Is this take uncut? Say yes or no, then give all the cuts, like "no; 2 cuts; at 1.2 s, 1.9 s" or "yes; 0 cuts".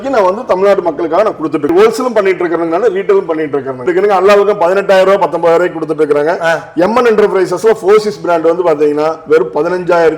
no; 2 cuts; at 1.7 s, 3.8 s